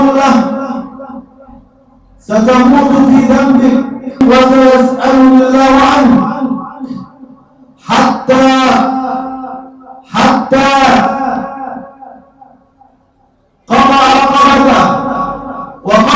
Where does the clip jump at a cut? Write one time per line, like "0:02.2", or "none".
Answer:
0:04.2